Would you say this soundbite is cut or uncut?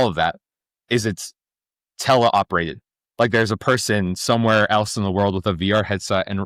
uncut